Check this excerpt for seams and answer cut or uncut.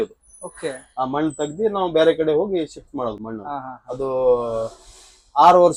uncut